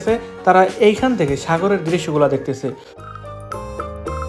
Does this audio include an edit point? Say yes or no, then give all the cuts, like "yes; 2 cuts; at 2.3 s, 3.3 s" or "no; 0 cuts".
no; 0 cuts